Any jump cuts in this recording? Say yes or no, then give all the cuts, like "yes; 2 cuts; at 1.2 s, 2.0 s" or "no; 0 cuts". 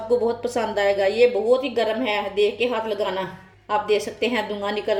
no; 0 cuts